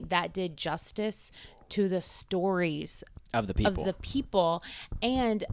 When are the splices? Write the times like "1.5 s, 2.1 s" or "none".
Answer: none